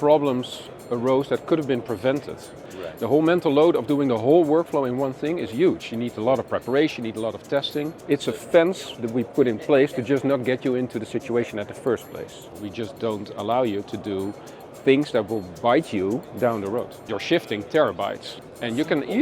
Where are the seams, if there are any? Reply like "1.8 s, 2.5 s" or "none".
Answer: 2.6 s, 8.0 s, 12.6 s, 17.1 s, 18.3 s